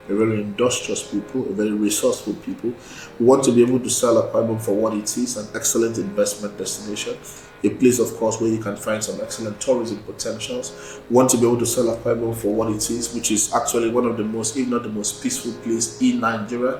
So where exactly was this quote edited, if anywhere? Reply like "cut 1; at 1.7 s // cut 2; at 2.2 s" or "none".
none